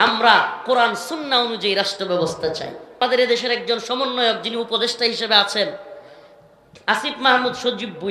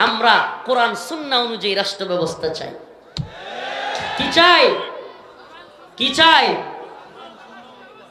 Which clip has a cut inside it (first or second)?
first